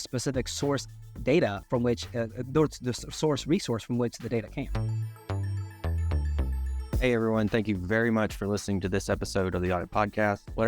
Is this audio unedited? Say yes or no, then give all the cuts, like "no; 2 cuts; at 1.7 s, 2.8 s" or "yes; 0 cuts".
no; 1 cut; at 4.7 s